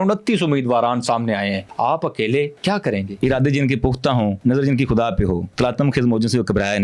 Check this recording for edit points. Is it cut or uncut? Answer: cut